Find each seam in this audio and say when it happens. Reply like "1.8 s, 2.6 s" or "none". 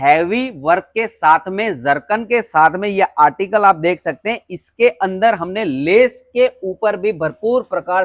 none